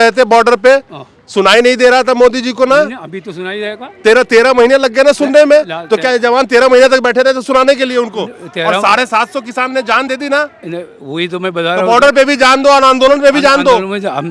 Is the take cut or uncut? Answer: uncut